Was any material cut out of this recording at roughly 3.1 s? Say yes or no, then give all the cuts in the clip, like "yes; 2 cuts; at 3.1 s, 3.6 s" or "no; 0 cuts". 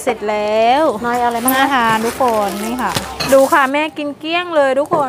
yes; 1 cut; at 3.1 s